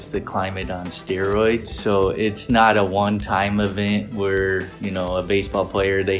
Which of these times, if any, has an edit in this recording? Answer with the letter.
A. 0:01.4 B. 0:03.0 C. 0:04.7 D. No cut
D